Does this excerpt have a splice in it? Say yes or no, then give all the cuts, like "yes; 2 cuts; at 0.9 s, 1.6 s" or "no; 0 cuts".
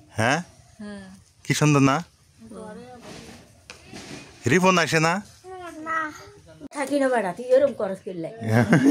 yes; 1 cut; at 6.7 s